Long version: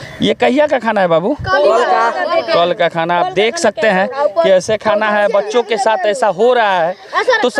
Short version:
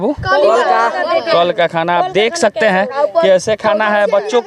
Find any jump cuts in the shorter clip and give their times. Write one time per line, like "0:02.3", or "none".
none